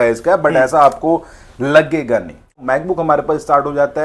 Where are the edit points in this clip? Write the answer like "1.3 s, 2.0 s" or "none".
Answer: 2.6 s